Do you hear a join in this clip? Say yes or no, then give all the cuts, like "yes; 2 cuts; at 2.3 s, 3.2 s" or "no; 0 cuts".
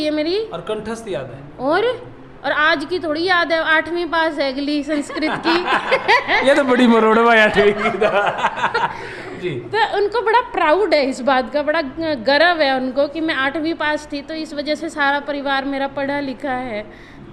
no; 0 cuts